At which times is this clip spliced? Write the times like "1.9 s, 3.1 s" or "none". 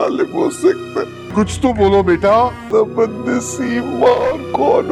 none